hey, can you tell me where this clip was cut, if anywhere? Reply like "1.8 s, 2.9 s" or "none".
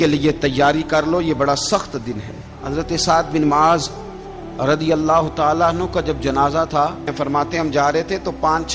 2.6 s, 7.1 s